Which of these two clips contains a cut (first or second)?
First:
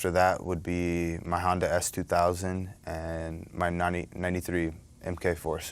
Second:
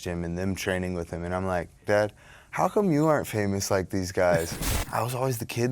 second